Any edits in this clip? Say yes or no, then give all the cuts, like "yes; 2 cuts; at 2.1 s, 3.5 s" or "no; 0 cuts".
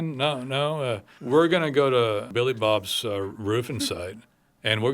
yes; 2 cuts; at 1.1 s, 2.3 s